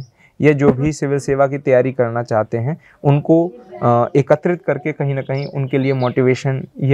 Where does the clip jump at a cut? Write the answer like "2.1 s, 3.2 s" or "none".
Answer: none